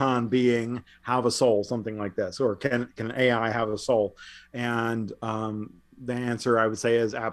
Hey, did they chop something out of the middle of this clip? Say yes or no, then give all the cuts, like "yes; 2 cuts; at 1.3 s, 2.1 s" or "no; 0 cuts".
no; 0 cuts